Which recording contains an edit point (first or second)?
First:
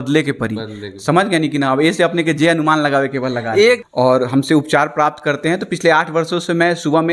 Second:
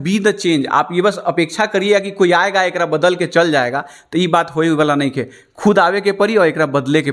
first